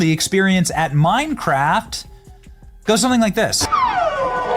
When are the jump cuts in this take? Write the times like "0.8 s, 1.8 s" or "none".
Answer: 3.6 s